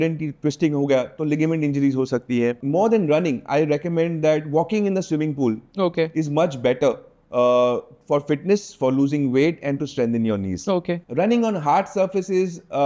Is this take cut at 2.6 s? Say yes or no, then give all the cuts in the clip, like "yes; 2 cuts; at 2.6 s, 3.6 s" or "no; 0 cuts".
yes; 2 cuts; at 2.6 s, 11.0 s